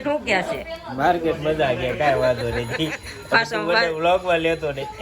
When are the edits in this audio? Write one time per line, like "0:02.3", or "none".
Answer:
none